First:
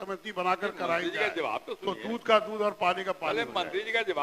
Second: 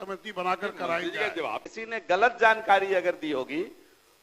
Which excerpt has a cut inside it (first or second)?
second